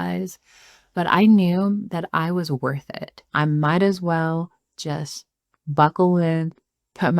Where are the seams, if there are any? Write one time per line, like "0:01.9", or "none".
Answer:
0:03.3